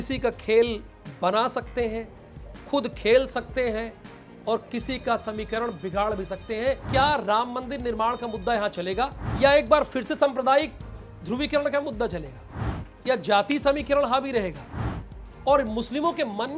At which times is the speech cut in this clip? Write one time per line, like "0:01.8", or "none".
0:06.8
0:09.2